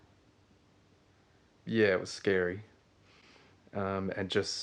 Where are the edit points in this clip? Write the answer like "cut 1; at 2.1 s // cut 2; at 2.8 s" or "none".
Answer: none